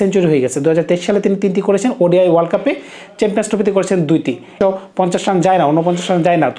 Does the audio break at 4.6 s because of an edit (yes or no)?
yes